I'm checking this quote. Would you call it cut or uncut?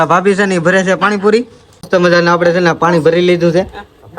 cut